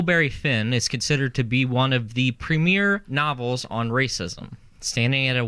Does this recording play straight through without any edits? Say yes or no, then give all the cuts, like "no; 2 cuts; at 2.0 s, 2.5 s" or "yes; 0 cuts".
no; 1 cut; at 3.1 s